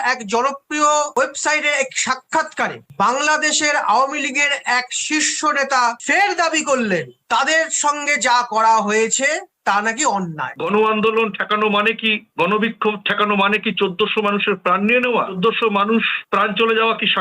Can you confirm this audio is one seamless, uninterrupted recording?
no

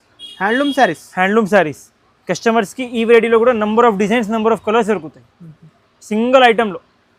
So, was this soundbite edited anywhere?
no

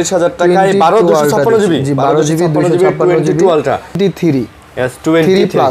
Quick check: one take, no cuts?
no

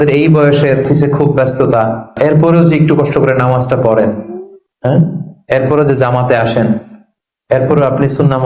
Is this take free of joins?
no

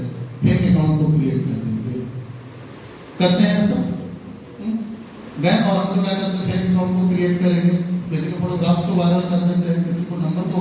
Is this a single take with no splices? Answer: yes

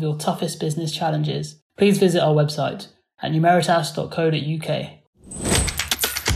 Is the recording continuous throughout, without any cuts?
no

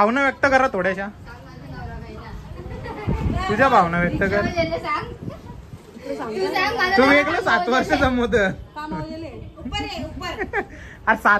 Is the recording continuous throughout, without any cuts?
yes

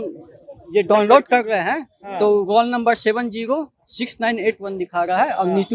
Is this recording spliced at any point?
no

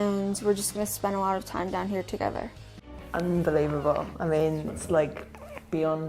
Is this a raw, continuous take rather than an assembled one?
no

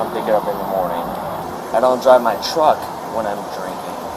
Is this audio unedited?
no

